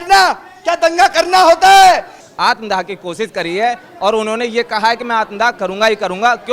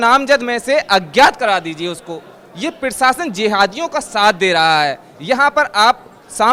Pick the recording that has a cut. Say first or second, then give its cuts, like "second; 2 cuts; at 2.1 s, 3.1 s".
first; 1 cut; at 2.2 s